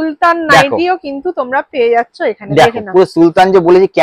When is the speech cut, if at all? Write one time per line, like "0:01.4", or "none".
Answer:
none